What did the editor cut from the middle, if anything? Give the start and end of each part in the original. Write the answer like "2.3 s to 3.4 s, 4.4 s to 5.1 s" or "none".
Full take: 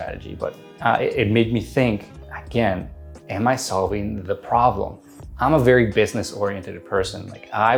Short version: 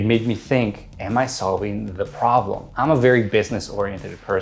2.2 s to 3.2 s, 4.9 s to 5.2 s